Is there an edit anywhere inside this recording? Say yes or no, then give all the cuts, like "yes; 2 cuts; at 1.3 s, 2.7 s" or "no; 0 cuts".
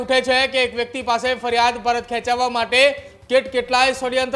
no; 0 cuts